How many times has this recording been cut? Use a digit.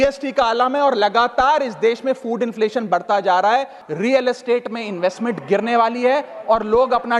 1